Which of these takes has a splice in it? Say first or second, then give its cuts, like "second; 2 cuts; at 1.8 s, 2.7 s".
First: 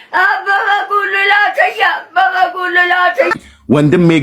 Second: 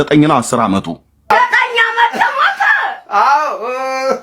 second; 1 cut; at 1.3 s